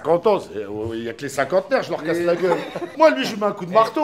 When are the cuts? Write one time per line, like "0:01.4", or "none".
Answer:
0:02.9